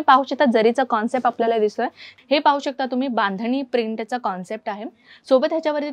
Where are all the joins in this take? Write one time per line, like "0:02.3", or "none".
0:02.1